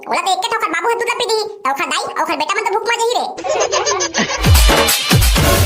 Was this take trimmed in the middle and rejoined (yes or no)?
yes